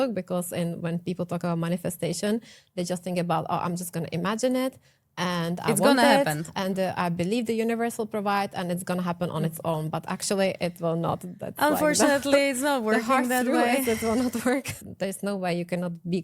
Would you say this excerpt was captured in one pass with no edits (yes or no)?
no